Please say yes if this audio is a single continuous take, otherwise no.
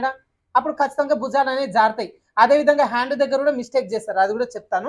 yes